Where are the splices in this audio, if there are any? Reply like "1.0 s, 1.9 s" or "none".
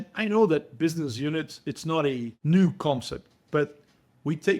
2.3 s